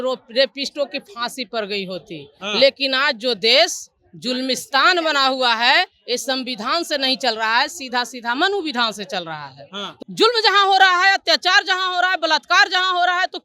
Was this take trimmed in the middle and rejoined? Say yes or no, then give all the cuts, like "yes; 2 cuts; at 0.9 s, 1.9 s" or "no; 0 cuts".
yes; 1 cut; at 9.8 s